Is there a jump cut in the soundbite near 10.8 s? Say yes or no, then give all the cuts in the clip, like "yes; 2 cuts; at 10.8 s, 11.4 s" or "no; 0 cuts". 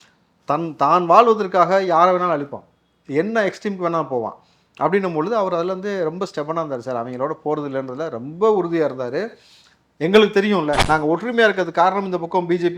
yes; 1 cut; at 10.8 s